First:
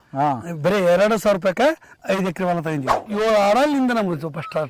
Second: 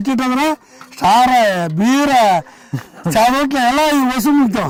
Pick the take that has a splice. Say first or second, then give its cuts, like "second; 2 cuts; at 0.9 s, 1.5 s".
first; 2 cuts; at 2.0 s, 3.1 s